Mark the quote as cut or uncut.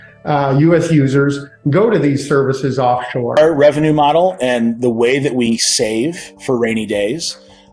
cut